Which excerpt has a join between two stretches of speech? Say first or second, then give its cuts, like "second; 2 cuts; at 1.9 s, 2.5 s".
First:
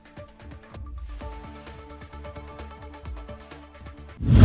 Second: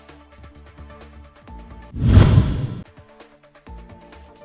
second; 1 cut; at 1.7 s